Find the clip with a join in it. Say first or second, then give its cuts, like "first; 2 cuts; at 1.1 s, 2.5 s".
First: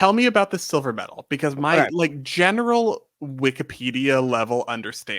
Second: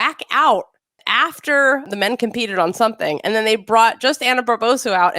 second; 2 cuts; at 0.9 s, 1.8 s